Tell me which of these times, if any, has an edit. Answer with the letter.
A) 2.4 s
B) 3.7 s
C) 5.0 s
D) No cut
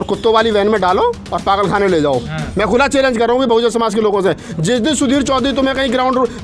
A